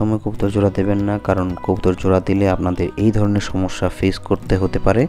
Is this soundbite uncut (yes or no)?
yes